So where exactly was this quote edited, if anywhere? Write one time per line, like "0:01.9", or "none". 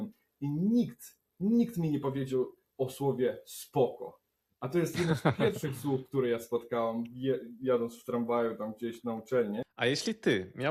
0:09.7